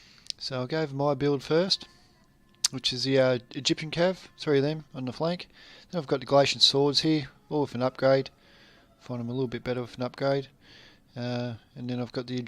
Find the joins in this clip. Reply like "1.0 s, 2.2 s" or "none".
9.1 s